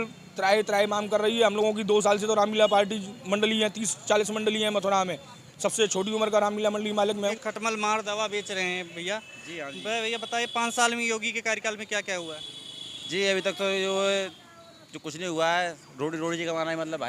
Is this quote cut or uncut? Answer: cut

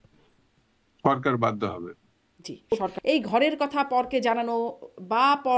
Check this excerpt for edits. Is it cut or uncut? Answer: cut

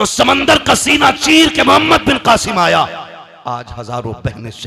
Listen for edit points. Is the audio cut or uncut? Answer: uncut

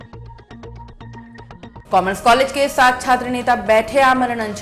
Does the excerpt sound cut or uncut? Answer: cut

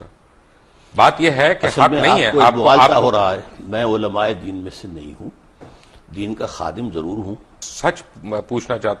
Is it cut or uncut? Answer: cut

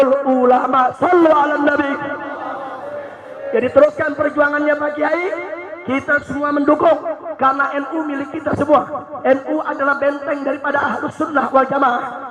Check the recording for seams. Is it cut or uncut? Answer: uncut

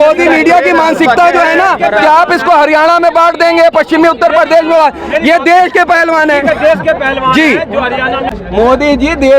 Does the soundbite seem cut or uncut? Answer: cut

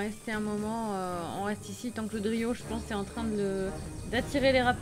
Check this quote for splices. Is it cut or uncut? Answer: uncut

